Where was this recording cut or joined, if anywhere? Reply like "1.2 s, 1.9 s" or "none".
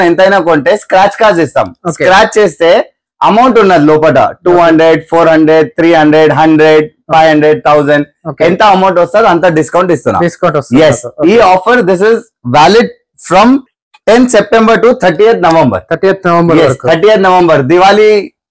none